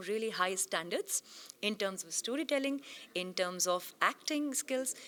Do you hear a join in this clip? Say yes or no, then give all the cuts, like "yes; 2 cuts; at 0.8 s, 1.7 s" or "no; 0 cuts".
no; 0 cuts